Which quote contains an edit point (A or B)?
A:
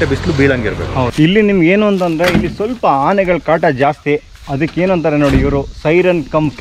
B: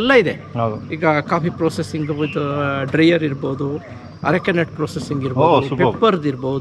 A